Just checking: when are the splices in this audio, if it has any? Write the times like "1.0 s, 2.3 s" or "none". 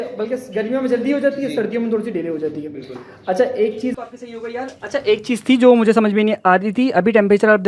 3.9 s

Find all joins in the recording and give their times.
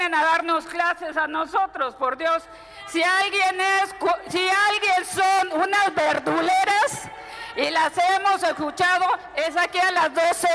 none

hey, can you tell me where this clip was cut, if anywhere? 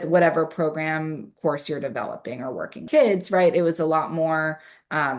2.9 s

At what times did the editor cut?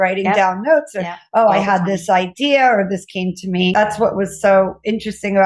3.7 s

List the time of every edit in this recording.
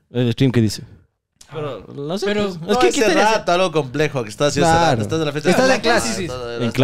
none

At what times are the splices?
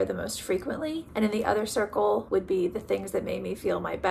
2.2 s

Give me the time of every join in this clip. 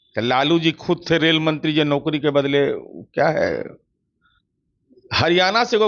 none

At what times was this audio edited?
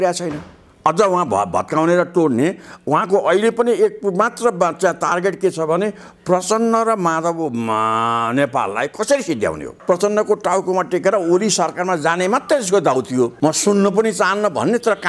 9.7 s, 13.3 s

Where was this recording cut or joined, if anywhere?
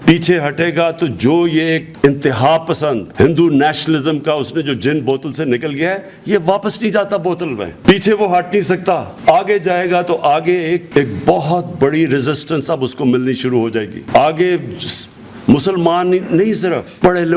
none

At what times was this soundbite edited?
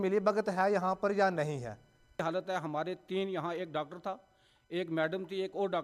2.2 s

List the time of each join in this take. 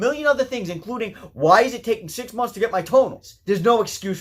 3.3 s

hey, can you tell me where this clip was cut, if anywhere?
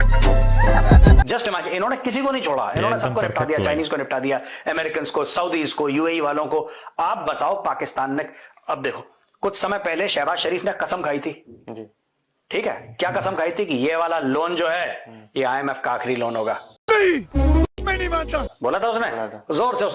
1.2 s

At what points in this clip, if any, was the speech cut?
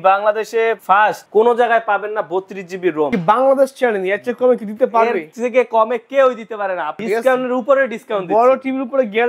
3.1 s, 7.0 s

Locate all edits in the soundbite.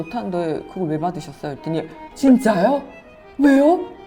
none

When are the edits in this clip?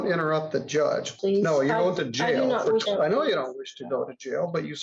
1.1 s, 2.8 s

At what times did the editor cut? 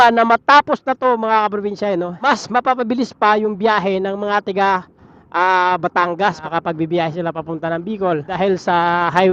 2.2 s, 8.3 s

